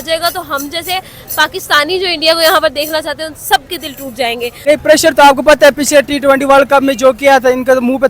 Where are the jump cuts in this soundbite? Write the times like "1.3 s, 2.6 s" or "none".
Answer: 4.6 s